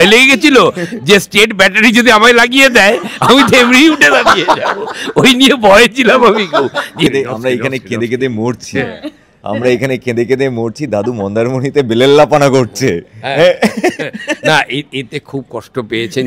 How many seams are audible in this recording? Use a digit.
1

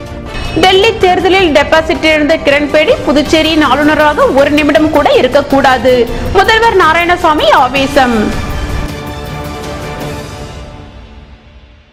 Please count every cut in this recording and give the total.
0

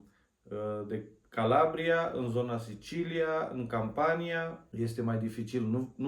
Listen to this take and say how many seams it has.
1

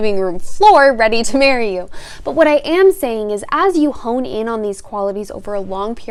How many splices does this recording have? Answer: 0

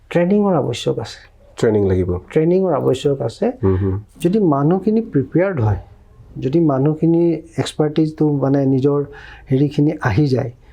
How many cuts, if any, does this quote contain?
1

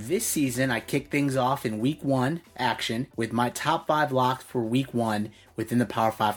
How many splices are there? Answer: 1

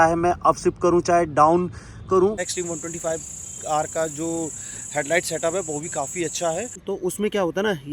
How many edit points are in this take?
2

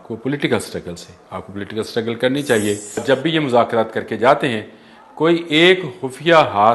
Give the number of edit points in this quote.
1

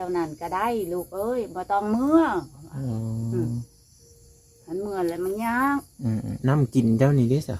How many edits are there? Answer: 1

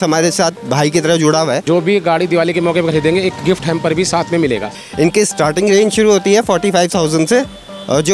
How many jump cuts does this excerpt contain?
2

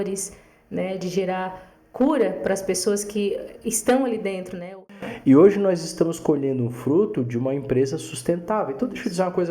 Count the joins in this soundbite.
1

